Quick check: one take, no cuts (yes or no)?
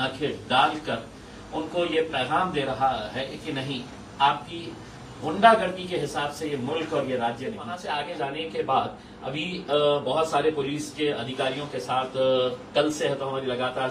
no